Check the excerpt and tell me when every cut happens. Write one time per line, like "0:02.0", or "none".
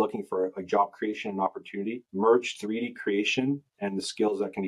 none